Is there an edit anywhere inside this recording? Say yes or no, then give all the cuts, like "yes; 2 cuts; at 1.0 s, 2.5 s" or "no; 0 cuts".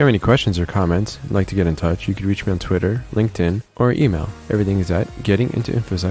no; 0 cuts